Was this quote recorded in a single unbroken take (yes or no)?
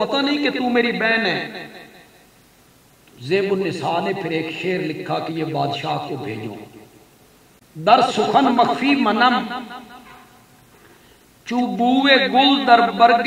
no